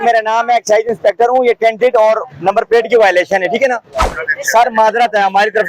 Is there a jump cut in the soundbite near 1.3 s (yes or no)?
no